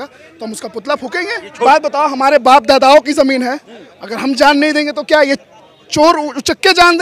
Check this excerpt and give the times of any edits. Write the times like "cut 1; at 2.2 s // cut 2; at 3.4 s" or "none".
cut 1; at 1.6 s